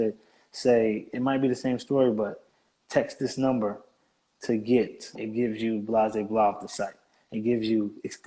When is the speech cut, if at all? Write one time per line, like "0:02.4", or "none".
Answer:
0:05.2